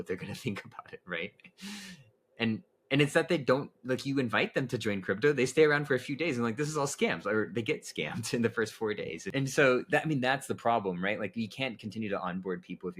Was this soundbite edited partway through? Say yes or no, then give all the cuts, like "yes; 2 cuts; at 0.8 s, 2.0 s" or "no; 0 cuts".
yes; 1 cut; at 9.2 s